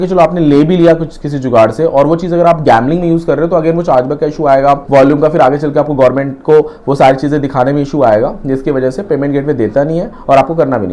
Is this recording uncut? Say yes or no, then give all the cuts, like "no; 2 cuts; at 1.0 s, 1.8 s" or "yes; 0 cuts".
yes; 0 cuts